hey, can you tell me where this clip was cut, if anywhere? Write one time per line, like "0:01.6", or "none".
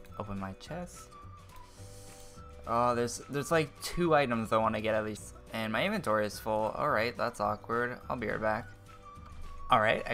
none